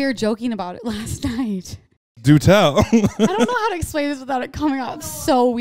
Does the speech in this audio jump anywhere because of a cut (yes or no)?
yes